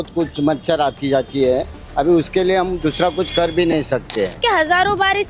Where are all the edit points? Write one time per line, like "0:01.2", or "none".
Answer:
0:04.4